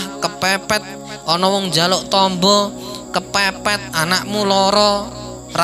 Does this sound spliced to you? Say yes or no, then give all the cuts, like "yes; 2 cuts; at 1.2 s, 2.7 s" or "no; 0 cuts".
no; 0 cuts